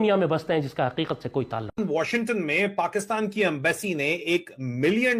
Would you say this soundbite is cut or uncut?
cut